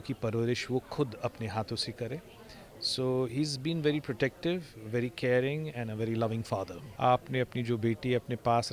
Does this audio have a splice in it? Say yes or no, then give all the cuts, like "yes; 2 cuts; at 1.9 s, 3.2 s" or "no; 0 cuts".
yes; 1 cut; at 6.8 s